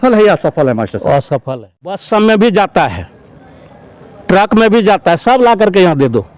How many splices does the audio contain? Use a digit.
1